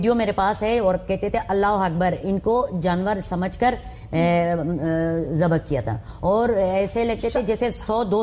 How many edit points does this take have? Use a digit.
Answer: 0